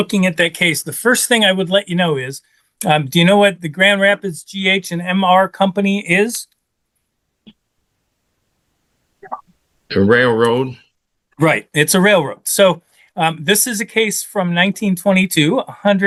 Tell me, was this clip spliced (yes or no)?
no